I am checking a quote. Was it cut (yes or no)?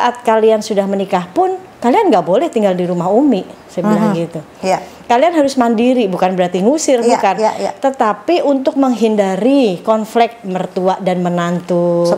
no